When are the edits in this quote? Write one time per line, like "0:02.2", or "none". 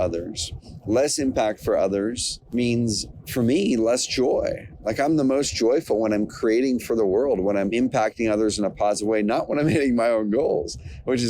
0:02.3
0:07.7